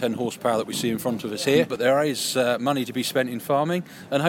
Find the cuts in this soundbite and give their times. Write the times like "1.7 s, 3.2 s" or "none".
1.7 s